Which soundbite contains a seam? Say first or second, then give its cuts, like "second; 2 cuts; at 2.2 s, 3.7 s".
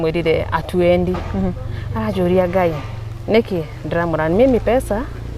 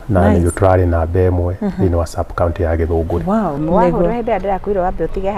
second; 1 cut; at 3.6 s